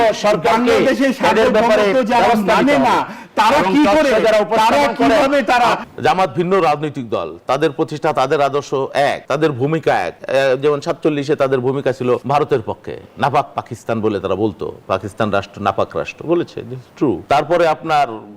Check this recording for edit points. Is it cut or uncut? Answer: cut